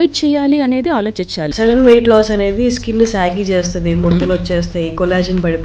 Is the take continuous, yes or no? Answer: no